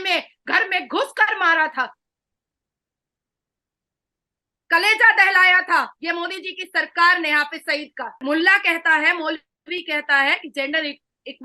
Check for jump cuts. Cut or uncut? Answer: cut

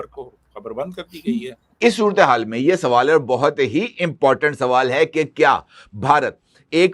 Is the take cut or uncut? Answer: cut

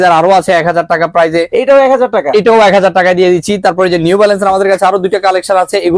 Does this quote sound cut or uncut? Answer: uncut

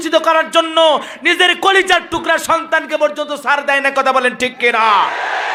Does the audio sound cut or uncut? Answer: uncut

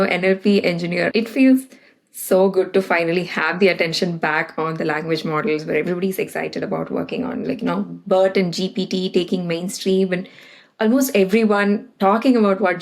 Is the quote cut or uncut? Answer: cut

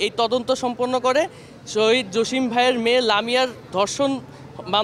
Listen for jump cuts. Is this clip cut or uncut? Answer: uncut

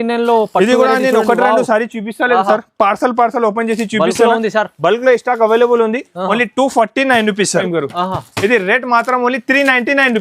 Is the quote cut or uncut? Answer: cut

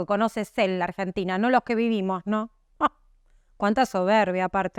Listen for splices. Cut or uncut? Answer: uncut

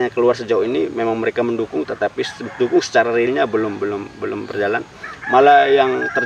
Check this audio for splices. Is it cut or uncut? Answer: uncut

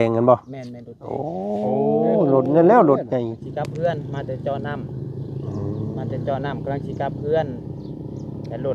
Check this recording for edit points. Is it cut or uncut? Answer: cut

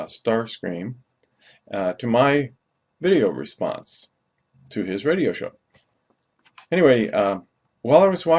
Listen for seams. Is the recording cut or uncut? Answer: uncut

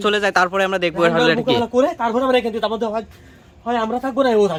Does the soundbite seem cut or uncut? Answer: uncut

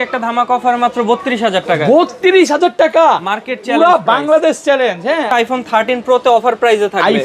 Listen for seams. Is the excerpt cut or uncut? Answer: cut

